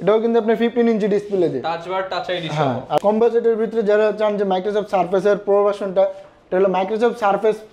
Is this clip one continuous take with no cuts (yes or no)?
no